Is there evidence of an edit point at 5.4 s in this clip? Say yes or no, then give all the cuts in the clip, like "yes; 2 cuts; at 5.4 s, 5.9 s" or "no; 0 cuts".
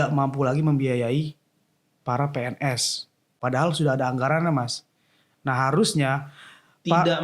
no; 1 cut; at 3.4 s